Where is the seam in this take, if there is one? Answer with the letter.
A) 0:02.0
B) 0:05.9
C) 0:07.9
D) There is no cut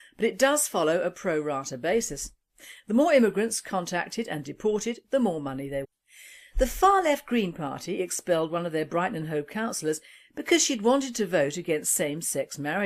D